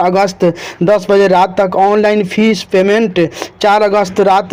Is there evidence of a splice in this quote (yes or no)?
no